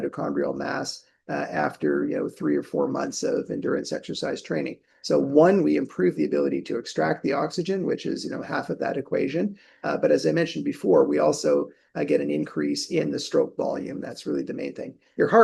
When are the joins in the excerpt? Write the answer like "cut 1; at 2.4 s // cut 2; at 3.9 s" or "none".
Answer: none